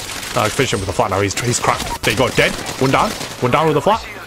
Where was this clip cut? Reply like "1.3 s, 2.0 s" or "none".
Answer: none